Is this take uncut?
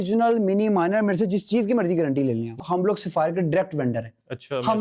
no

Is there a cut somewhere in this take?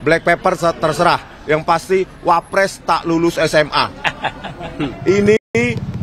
yes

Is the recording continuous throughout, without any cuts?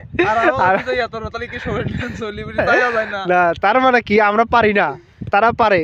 yes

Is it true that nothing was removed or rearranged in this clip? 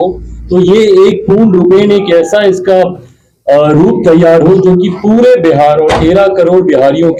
yes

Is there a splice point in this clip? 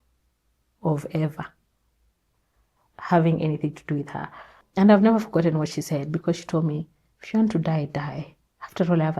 yes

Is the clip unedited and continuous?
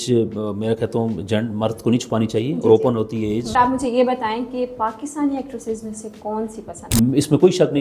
no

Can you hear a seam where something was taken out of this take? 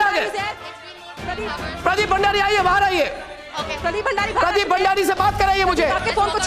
no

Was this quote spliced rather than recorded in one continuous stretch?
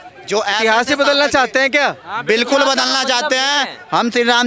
no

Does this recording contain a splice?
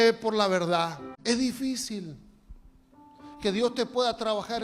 yes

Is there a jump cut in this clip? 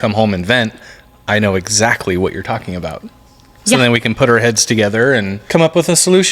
yes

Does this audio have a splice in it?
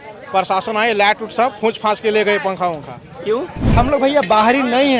yes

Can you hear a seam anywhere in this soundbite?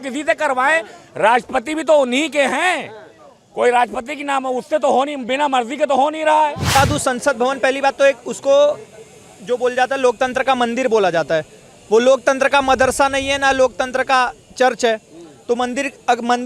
yes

